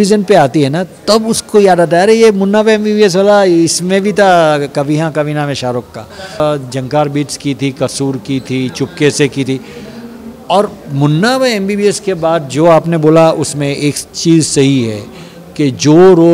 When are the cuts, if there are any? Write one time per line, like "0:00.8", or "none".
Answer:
0:06.4

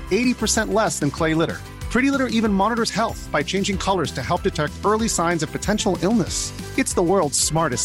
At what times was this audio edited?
none

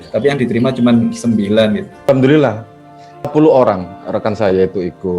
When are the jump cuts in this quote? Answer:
0:02.1
0:03.3

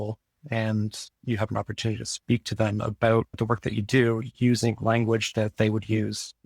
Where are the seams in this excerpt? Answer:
0:03.3

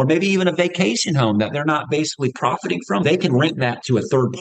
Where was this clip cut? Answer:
0:03.0

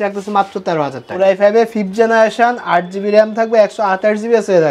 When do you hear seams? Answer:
0:01.2

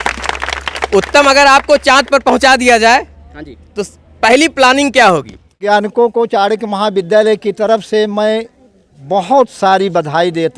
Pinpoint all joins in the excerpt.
0:05.7

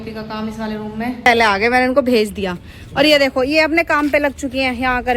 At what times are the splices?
0:01.3

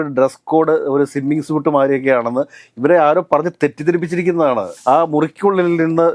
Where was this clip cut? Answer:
0:04.7

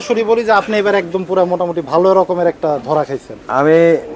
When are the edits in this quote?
none

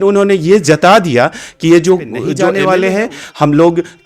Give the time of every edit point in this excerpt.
0:02.4

